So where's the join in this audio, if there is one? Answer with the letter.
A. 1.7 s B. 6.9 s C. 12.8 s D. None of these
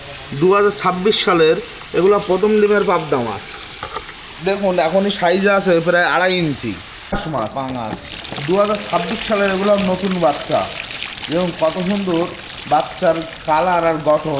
B